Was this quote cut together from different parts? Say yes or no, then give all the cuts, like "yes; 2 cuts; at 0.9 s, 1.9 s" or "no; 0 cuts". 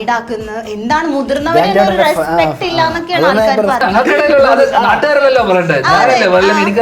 yes; 1 cut; at 3.8 s